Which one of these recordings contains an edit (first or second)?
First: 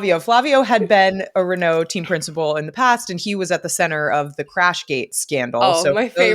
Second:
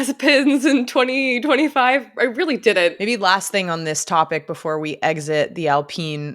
second